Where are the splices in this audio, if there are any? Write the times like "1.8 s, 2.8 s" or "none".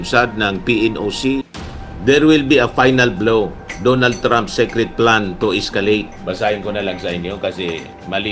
1.5 s

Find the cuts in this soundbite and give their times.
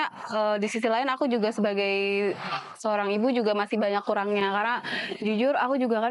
none

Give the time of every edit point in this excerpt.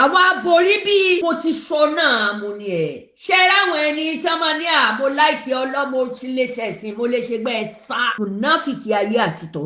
1.2 s, 8.1 s

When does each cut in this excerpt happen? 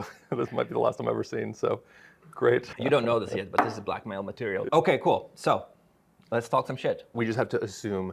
4.6 s, 7.1 s

